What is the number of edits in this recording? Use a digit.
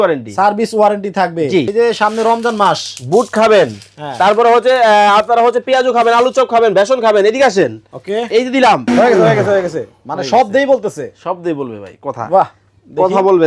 2